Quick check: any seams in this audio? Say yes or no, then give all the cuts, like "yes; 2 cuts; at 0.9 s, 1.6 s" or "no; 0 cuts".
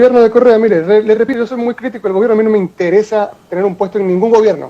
yes; 1 cut; at 1.3 s